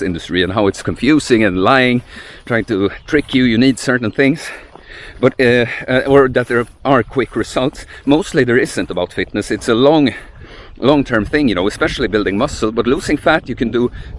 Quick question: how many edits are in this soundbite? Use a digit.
0